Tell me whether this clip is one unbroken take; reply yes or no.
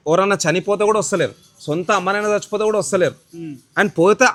yes